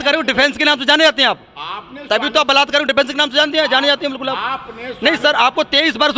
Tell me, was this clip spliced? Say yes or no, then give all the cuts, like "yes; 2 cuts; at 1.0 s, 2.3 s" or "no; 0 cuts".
no; 0 cuts